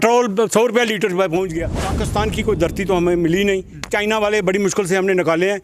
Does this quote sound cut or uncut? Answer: cut